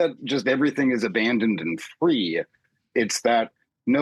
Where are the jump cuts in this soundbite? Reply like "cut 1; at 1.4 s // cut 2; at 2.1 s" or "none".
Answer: none